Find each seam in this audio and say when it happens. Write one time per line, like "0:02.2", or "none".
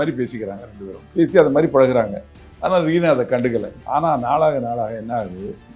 none

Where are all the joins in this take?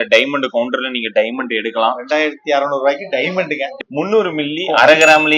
0:03.7

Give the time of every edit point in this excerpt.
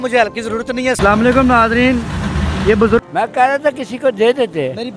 0:01.0
0:03.0

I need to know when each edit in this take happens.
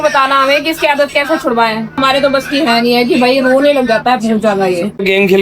none

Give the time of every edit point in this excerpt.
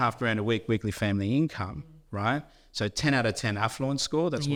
none

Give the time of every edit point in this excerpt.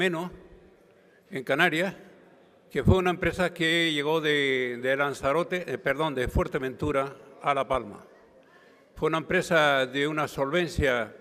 none

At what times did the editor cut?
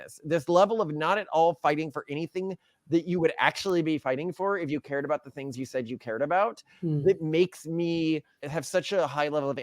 0:08.5

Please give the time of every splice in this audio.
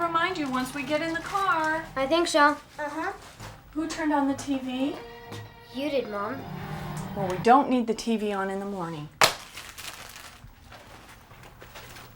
0:03.5

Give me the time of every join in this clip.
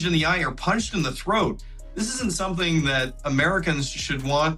0:03.2

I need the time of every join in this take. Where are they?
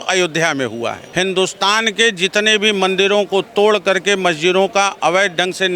0:01.0

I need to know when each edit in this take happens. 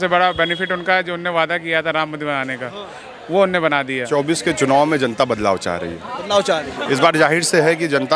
0:04.1

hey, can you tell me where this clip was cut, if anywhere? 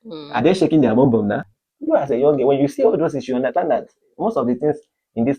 0:01.4

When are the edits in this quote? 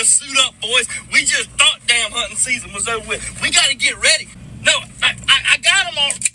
0:04.4

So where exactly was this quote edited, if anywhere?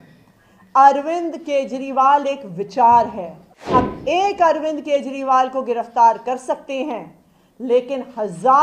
0:03.7

